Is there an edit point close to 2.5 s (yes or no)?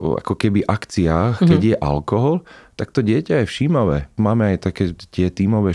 no